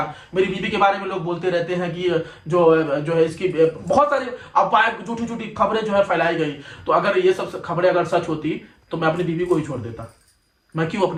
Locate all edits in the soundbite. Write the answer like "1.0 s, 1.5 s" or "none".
none